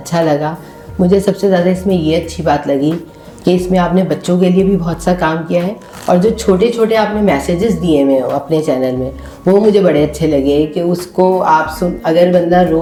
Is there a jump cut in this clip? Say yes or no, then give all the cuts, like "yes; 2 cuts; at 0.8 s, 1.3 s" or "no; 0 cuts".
no; 0 cuts